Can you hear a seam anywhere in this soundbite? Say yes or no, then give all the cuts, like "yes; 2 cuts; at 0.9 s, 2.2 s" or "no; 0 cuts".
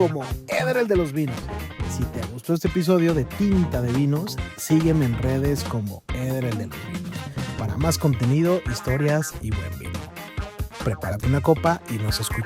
yes; 2 cuts; at 9.5 s, 10.8 s